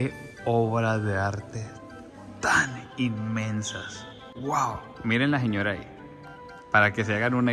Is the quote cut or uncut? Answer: uncut